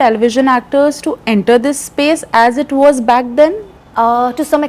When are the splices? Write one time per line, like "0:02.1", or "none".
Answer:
none